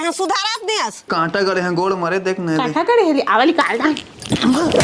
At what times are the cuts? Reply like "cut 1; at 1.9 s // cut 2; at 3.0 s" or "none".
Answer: cut 1; at 1.1 s

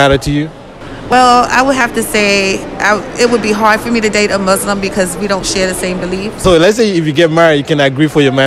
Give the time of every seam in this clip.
cut 1; at 1.1 s // cut 2; at 6.4 s

